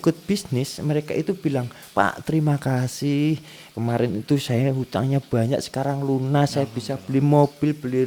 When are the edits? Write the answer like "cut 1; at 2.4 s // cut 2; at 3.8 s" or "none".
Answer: none